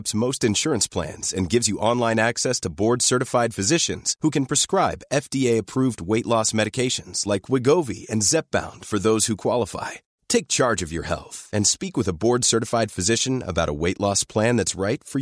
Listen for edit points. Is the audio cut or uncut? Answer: uncut